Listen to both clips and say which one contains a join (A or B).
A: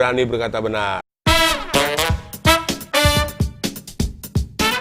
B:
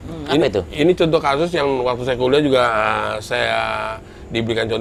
A